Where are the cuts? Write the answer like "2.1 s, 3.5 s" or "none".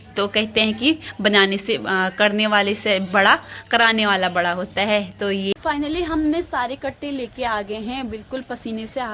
5.5 s